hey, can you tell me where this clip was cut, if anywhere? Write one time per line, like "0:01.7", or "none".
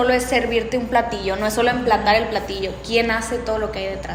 none